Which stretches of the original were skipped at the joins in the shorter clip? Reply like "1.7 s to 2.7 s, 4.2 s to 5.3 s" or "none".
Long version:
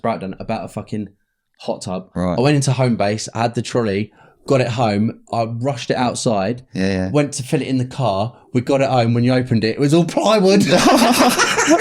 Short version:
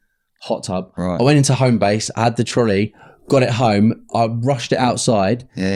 none